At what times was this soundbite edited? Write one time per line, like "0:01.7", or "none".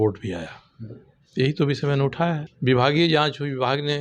0:02.5